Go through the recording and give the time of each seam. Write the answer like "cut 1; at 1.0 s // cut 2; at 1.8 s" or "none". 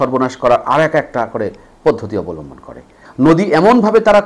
cut 1; at 3.0 s